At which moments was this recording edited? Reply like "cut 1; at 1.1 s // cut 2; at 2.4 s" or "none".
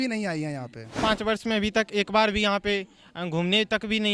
cut 1; at 1.0 s